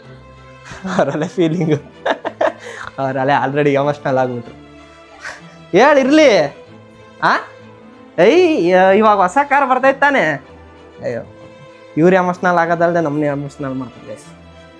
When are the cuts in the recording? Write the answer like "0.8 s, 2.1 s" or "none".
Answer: none